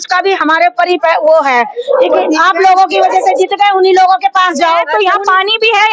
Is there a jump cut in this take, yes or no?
yes